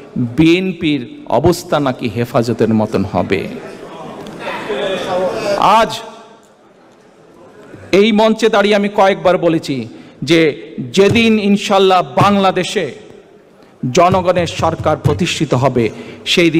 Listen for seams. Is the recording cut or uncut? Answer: uncut